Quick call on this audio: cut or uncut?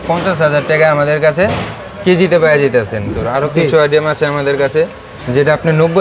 cut